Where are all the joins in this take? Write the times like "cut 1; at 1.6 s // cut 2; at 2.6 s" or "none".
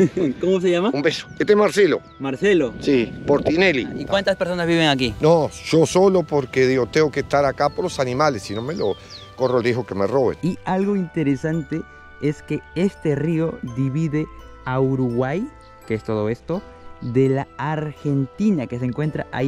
cut 1; at 4.0 s // cut 2; at 10.4 s

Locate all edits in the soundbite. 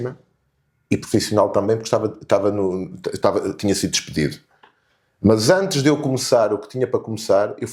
none

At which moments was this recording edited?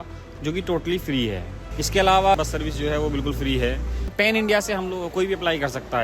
cut 1; at 1.6 s // cut 2; at 2.4 s // cut 3; at 4.1 s

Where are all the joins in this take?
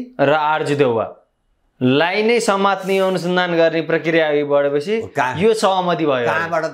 none

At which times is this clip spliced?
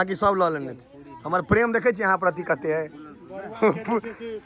none

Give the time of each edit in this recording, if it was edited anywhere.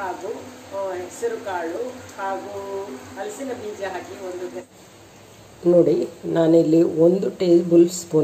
cut 1; at 4.6 s

